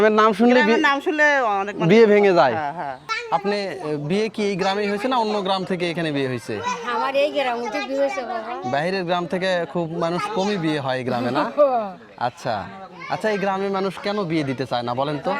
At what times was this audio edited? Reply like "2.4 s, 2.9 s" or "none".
3.0 s